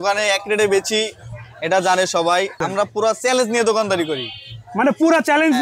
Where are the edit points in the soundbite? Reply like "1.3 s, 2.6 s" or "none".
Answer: 2.6 s